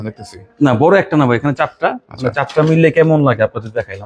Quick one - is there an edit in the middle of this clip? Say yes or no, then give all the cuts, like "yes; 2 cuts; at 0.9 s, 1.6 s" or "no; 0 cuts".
no; 0 cuts